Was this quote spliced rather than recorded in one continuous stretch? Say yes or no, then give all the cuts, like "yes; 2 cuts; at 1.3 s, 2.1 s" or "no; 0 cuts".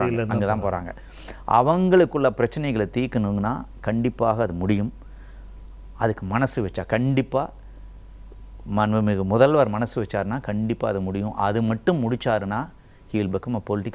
no; 0 cuts